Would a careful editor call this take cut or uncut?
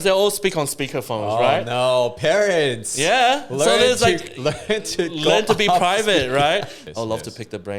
cut